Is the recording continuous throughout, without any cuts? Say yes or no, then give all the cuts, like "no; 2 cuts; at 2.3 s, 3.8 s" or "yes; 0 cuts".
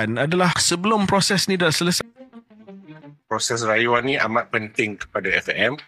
no; 1 cut; at 2.0 s